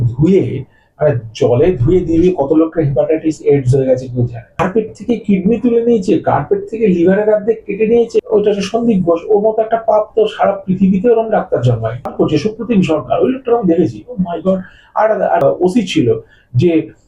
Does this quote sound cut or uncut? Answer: cut